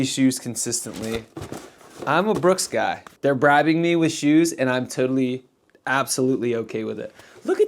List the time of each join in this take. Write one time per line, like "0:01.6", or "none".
0:03.1